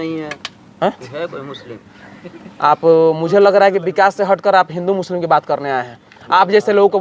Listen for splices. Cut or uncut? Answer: uncut